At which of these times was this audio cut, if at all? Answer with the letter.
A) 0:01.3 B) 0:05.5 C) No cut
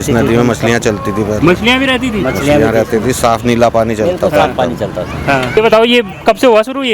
B